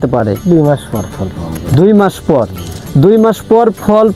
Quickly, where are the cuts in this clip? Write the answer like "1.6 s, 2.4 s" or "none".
none